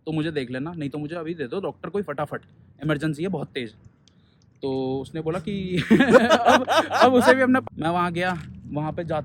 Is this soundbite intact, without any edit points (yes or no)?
no